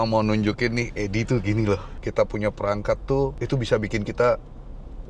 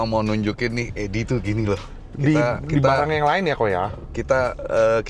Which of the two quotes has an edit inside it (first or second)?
first